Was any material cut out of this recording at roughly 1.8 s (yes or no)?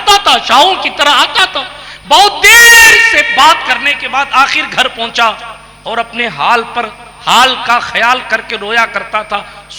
no